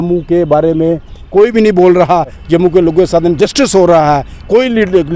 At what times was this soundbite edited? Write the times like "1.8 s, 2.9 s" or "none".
2.4 s